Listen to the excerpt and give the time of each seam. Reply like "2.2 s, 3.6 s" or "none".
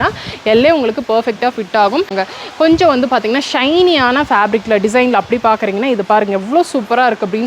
2.1 s